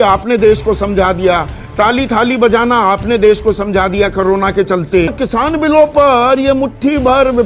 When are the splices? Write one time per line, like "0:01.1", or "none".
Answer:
0:05.1